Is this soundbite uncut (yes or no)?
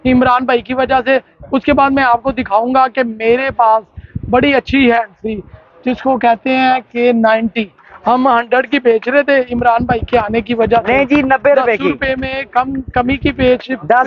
yes